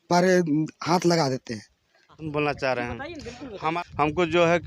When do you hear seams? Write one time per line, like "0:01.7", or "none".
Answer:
0:02.2
0:03.8